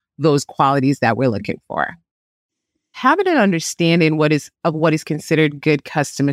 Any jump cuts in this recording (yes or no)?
yes